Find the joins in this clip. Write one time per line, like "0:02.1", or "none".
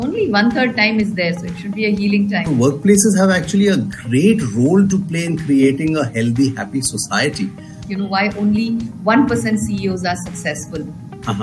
0:02.4
0:07.8